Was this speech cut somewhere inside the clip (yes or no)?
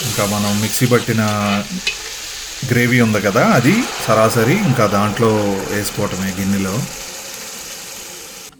no